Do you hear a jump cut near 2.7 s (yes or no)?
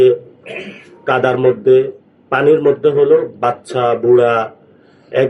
no